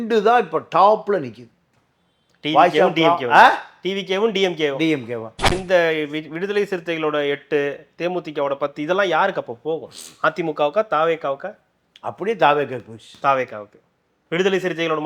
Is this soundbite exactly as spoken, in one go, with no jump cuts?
no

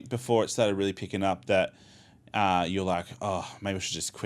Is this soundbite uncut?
yes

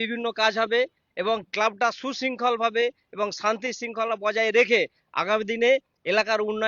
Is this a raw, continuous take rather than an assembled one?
yes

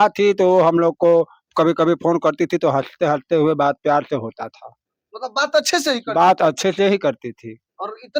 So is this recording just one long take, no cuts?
yes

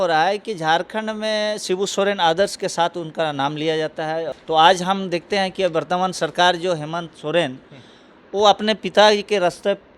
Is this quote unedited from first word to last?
no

